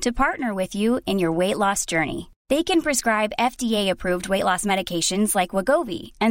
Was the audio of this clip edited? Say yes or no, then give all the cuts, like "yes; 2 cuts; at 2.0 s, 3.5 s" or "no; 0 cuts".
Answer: no; 0 cuts